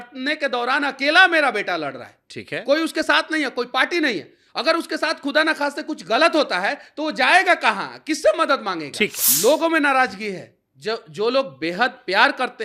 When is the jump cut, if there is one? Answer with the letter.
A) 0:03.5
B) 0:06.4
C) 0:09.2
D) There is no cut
C